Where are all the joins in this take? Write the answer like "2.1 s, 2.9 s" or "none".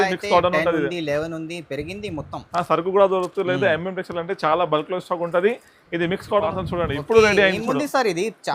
6.5 s